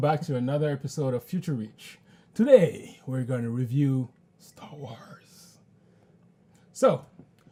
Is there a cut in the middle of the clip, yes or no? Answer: no